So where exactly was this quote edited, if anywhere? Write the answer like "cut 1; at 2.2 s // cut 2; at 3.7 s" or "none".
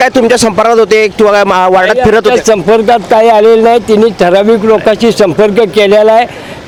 none